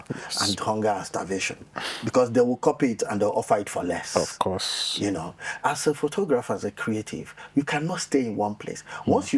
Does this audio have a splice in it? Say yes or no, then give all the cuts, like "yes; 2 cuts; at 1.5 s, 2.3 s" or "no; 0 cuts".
yes; 1 cut; at 5.3 s